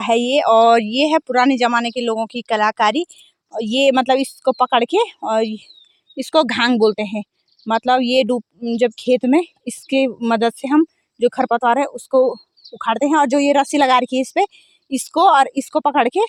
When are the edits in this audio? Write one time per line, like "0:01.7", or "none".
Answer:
none